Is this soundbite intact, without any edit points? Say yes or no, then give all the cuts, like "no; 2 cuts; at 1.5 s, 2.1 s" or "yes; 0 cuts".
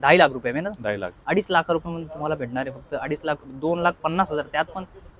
yes; 0 cuts